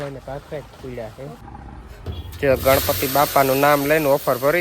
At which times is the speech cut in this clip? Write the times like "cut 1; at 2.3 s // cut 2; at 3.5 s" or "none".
cut 1; at 1.4 s